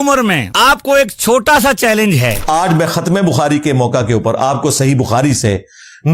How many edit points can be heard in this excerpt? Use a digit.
1